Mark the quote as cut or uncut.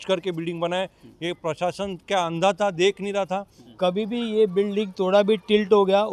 cut